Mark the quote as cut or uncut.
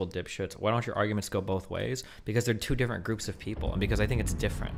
uncut